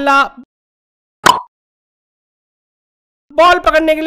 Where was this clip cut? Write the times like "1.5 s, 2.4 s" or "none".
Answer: none